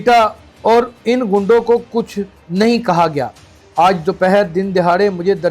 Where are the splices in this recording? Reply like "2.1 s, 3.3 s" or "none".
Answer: none